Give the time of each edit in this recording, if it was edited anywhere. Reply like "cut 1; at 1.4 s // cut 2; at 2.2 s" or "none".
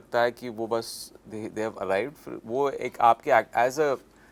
none